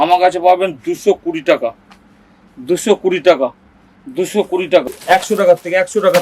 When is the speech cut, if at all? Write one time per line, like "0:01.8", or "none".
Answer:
0:04.9